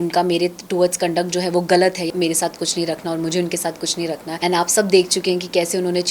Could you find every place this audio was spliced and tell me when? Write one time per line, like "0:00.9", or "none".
0:02.1
0:04.3